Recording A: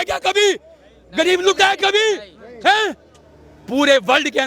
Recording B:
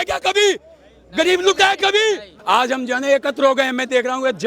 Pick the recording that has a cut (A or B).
B